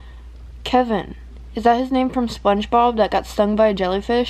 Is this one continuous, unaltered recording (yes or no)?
yes